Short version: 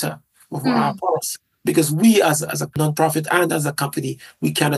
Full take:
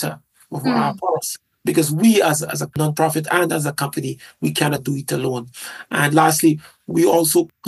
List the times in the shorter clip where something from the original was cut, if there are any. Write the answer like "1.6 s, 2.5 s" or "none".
none